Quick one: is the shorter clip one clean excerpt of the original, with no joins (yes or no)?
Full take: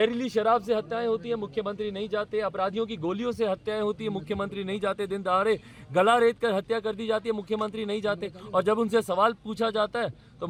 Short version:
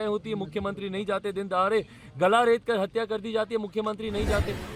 yes